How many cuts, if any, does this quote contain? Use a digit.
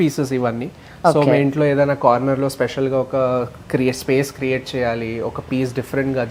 0